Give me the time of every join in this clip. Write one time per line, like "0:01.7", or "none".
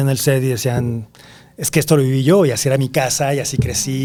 none